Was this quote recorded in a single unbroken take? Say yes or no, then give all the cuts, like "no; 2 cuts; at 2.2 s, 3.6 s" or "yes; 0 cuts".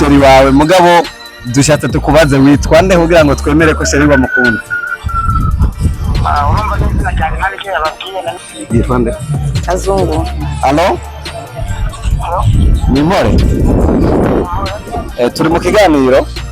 no; 1 cut; at 8.3 s